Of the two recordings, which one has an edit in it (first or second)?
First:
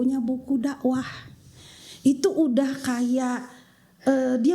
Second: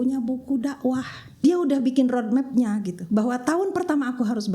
second